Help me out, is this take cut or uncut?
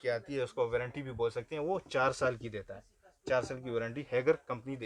uncut